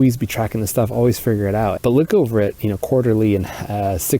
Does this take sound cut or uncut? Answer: cut